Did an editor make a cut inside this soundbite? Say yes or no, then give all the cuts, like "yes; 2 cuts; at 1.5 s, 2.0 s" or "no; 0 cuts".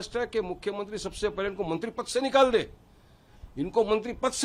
no; 0 cuts